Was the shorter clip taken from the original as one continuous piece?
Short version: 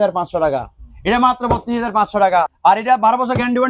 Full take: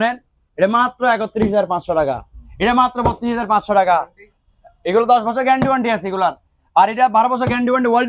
no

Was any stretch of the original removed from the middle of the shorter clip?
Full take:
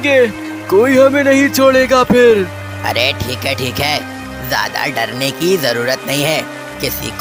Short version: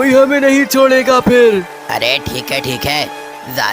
yes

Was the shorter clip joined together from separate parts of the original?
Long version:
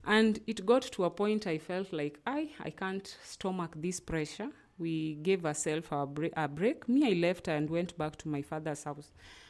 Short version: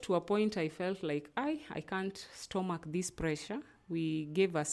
no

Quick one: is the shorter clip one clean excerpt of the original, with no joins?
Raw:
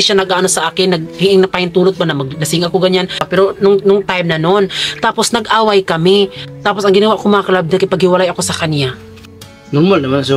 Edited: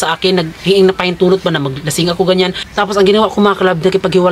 no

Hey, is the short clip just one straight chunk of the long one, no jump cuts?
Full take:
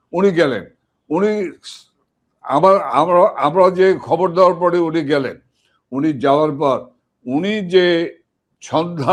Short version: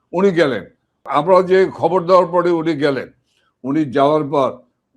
no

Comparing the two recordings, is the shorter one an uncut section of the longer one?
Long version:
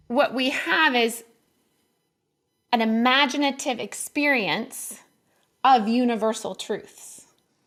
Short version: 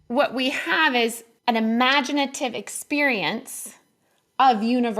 no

